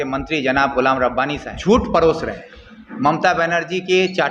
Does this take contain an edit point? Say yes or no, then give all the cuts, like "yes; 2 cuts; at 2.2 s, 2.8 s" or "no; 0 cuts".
yes; 1 cut; at 1.5 s